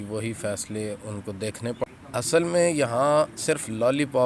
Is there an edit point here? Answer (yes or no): yes